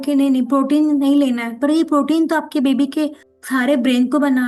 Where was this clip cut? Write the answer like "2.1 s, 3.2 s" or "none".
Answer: none